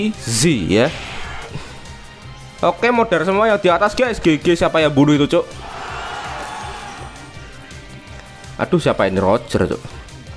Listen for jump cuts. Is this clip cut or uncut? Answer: cut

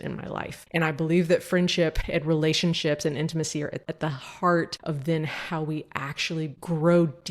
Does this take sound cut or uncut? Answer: cut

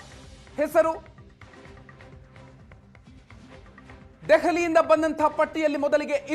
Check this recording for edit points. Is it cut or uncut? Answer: uncut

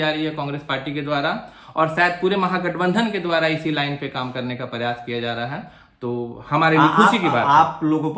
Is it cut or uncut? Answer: uncut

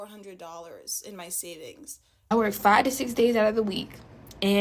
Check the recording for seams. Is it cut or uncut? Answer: cut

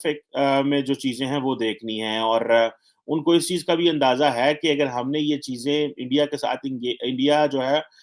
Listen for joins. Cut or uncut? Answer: uncut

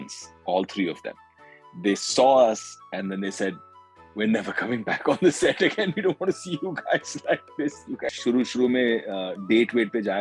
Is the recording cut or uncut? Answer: cut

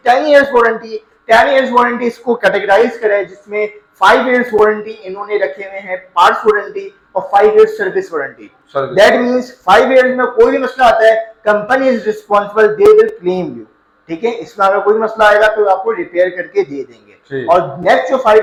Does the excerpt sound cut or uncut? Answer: uncut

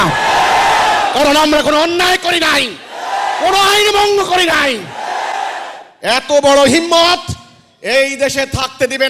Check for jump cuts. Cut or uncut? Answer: uncut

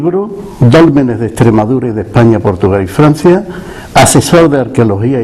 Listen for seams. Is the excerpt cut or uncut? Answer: cut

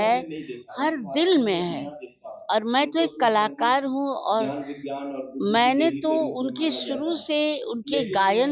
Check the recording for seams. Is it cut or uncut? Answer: uncut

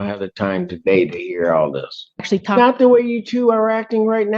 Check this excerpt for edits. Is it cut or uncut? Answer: cut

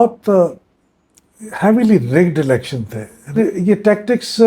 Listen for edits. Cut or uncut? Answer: cut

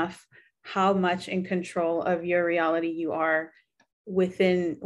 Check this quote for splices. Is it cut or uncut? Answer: uncut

